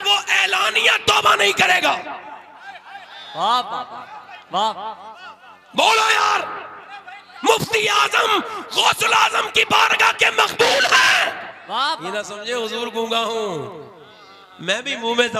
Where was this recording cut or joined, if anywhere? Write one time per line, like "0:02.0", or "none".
0:12.3